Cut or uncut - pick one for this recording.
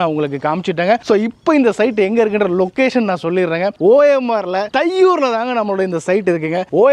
uncut